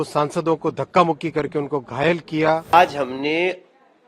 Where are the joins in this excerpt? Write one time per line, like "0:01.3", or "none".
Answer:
0:02.6